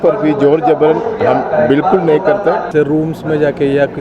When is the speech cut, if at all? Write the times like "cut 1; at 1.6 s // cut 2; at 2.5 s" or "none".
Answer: cut 1; at 2.7 s